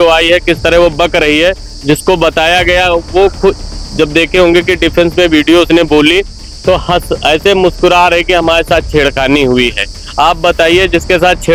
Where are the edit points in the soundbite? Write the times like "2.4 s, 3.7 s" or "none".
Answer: none